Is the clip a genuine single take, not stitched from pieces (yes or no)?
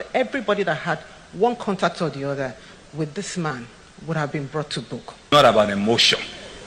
no